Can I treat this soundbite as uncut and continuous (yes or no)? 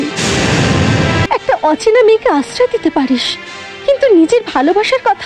no